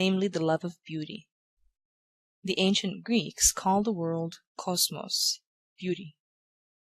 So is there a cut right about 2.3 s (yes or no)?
yes